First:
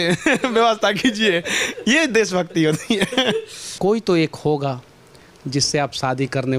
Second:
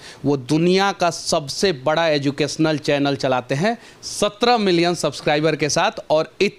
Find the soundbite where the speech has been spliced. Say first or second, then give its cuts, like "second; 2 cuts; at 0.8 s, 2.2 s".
first; 1 cut; at 3.6 s